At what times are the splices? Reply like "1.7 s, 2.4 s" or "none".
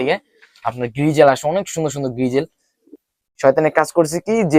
2.9 s

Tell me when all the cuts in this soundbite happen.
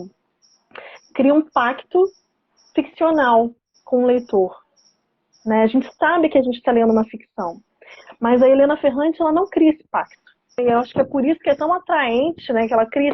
10.6 s

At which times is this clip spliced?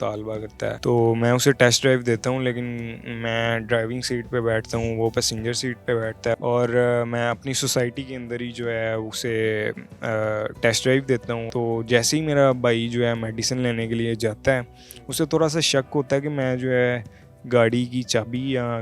0.8 s, 6.3 s, 11.4 s

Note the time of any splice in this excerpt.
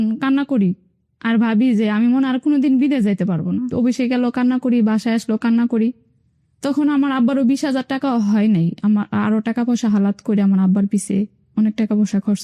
none

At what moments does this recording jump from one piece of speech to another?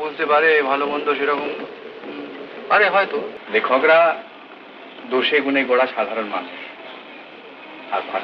3.4 s

